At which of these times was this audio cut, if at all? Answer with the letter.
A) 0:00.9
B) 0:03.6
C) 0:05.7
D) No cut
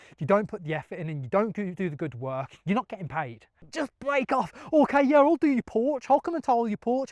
B